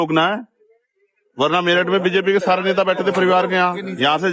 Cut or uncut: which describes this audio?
uncut